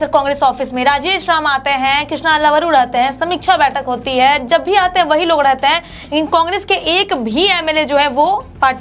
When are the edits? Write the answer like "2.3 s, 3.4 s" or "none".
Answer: none

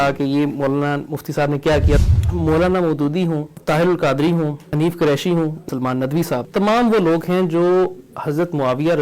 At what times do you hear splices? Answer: 2.0 s, 3.5 s, 4.6 s, 6.0 s

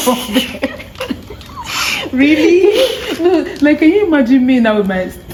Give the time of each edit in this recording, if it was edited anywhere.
none

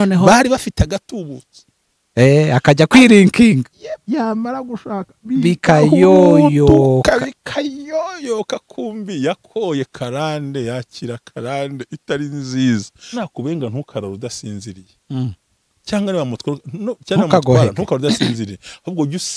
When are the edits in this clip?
13.2 s

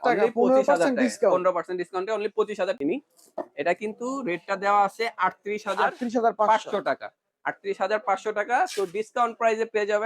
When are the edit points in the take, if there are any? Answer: 2.8 s

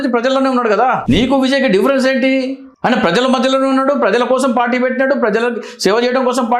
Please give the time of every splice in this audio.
1.0 s, 2.6 s

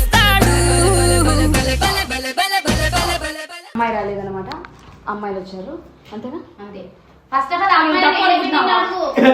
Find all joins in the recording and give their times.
3.7 s

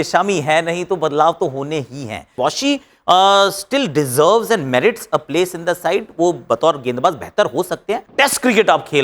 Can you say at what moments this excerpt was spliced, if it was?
2.4 s, 8.1 s

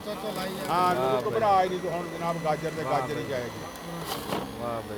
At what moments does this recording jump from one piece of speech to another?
none

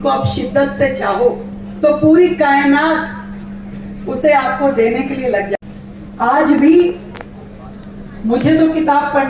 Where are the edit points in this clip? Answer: 5.4 s

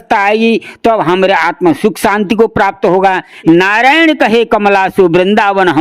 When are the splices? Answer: 3.3 s

